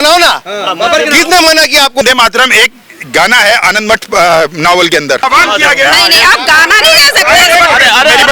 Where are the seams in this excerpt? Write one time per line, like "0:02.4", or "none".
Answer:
0:02.0
0:05.2